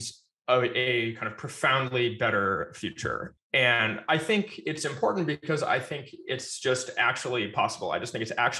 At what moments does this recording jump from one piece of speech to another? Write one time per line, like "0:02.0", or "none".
none